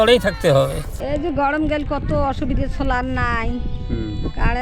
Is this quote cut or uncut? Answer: cut